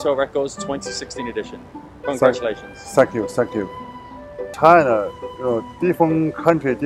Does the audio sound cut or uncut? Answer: uncut